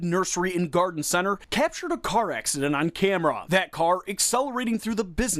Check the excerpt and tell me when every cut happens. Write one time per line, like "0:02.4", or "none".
0:03.5